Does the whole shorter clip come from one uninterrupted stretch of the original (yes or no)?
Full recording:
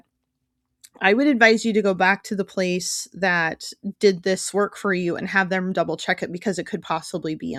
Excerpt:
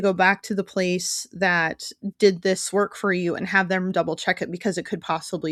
yes